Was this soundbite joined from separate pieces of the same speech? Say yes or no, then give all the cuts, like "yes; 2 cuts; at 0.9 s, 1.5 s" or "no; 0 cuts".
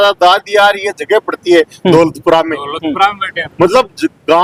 no; 0 cuts